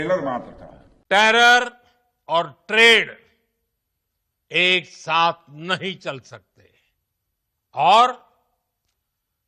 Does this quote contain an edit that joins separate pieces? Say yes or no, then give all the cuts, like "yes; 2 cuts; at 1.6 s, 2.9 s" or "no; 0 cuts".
yes; 1 cut; at 1.0 s